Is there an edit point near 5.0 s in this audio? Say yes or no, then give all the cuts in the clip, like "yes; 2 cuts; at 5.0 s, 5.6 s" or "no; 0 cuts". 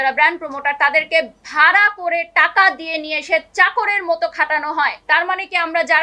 yes; 1 cut; at 5.0 s